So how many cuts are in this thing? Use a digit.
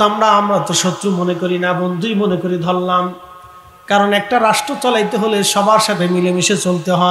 0